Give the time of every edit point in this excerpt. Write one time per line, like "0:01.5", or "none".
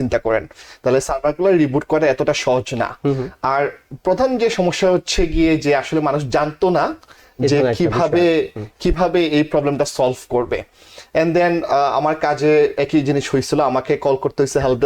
none